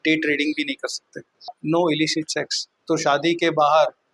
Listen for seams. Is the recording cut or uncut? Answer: cut